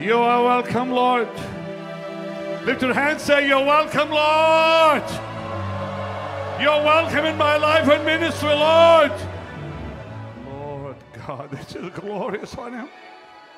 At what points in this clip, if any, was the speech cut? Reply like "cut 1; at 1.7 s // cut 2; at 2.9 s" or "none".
cut 1; at 10.2 s